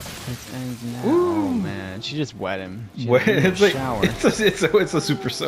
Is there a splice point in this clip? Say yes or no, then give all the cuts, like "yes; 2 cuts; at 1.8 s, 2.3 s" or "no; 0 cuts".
no; 0 cuts